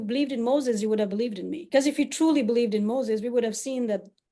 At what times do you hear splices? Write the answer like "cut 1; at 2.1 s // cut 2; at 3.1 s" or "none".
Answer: cut 1; at 1.6 s